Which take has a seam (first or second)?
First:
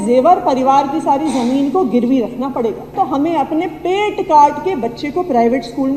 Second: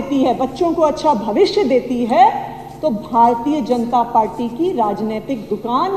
first